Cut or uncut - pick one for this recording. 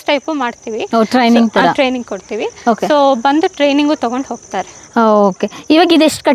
uncut